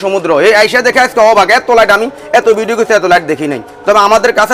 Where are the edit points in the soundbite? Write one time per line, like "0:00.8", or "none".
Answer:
none